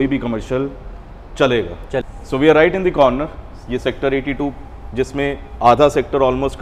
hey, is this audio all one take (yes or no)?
no